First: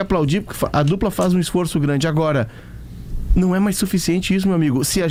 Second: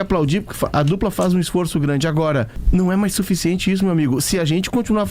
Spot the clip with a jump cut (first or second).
second